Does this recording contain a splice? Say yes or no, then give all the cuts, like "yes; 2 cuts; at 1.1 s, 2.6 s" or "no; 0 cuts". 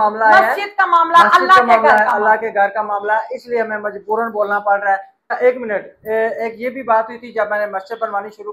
yes; 1 cut; at 5.3 s